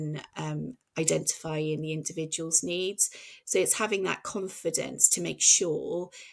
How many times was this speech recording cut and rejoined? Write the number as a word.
zero